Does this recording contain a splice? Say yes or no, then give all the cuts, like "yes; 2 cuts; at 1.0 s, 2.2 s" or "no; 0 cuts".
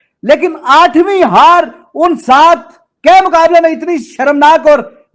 no; 0 cuts